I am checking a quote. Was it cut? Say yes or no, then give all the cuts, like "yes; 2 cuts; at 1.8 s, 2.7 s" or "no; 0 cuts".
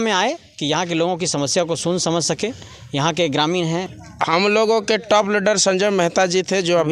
yes; 1 cut; at 3.9 s